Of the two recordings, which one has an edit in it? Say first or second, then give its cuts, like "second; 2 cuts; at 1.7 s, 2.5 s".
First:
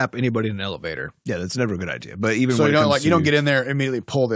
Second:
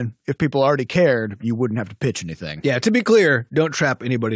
second; 1 cut; at 2.8 s